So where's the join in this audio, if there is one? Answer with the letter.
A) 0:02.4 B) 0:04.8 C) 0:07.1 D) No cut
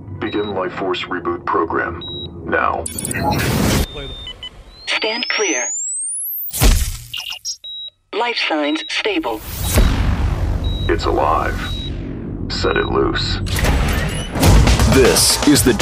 D